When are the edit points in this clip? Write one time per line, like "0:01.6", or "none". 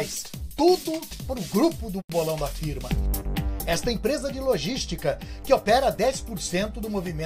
0:02.7

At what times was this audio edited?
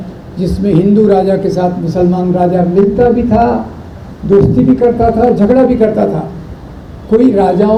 none

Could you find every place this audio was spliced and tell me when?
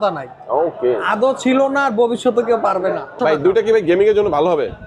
0:03.1

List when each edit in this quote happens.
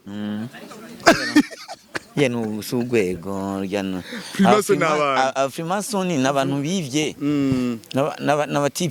none

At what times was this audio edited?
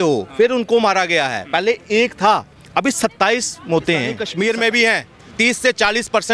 0:04.2

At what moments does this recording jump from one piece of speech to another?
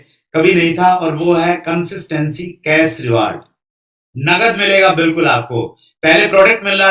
none

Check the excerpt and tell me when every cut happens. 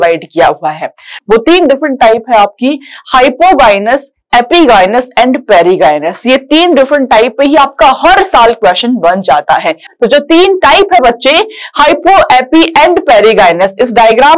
none

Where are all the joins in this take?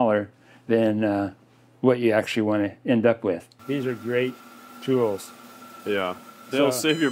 0:03.6

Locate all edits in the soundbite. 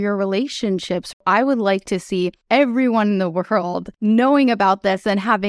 0:01.2
0:02.4
0:04.0

